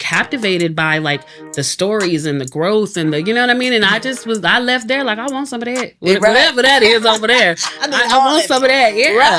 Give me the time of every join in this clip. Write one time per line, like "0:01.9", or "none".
none